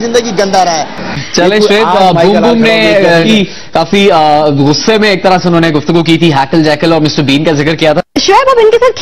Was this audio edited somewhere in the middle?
no; 0 cuts

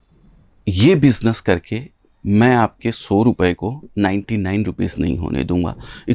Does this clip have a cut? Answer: no; 0 cuts

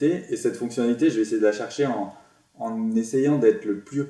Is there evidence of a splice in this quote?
no; 0 cuts

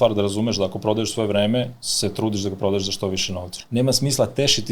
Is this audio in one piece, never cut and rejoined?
no; 1 cut; at 3.6 s

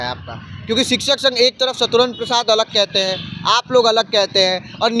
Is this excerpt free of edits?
yes; 0 cuts

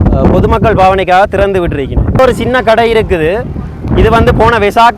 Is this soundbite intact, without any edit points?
no; 1 cut; at 2.2 s

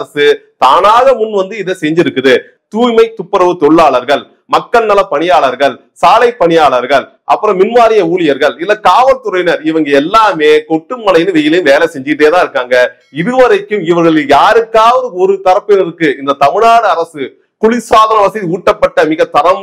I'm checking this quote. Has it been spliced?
yes; 1 cut; at 2.5 s

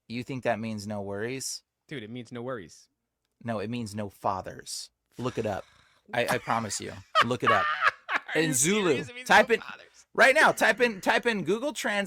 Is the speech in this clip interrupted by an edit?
no; 0 cuts

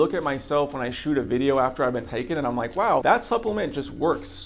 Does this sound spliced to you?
no; 0 cuts

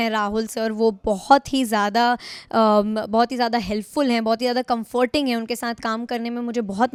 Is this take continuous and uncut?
yes; 0 cuts

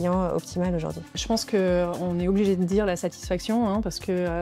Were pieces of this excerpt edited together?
yes; 1 cut; at 1.1 s

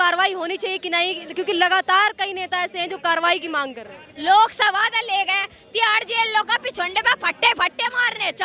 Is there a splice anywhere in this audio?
no; 0 cuts

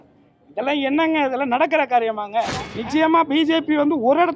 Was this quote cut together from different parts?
yes; 1 cut; at 2.7 s

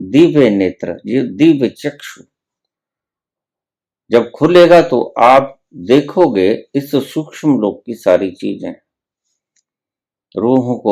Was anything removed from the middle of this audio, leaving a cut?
no; 0 cuts

